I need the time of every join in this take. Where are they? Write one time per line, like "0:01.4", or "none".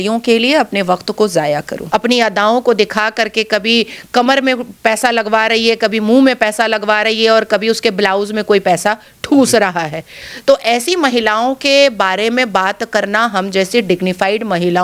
0:01.8